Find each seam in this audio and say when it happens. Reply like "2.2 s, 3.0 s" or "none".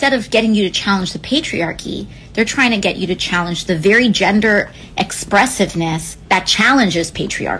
2.0 s, 6.1 s